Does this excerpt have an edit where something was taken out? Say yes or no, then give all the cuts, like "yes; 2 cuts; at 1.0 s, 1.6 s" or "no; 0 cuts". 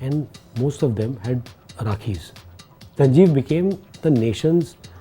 yes; 1 cut; at 3.0 s